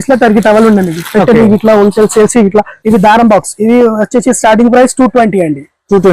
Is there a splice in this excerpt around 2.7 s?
yes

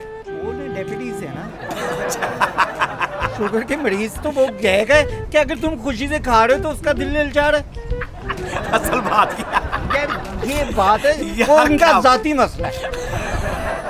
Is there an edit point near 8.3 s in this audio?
no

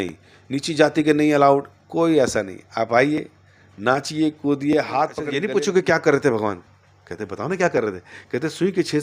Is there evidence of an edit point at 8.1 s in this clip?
no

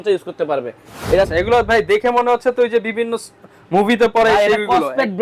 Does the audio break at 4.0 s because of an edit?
no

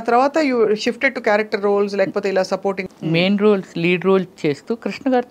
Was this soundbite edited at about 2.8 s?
yes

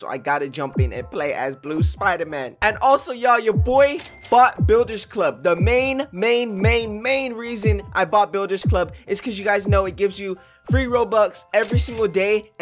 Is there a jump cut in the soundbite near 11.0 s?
yes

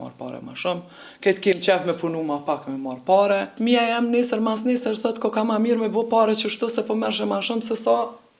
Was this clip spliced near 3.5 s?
yes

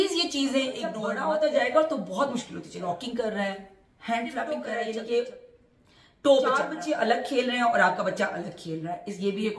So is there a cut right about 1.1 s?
yes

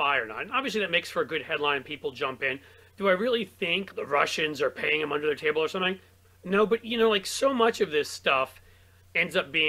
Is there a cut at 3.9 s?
yes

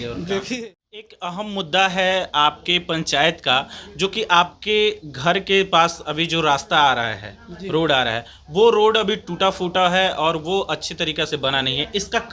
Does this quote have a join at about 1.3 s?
yes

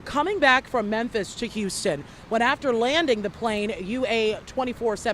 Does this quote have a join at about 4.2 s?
no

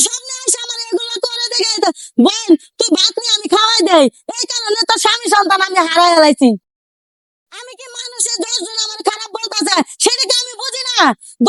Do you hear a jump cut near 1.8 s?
no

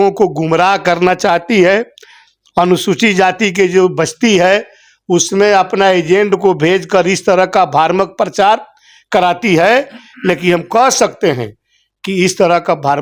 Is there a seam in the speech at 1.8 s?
no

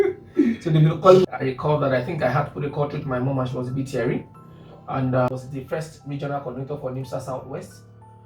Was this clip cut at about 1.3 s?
yes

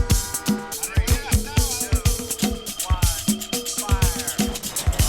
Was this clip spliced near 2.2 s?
no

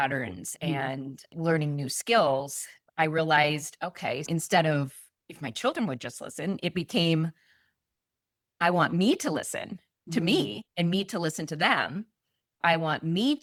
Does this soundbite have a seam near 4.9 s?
no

